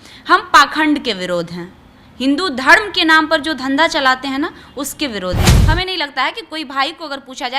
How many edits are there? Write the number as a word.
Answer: one